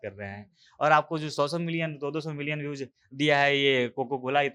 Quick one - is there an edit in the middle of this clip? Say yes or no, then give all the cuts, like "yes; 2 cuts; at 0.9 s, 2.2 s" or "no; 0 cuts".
no; 0 cuts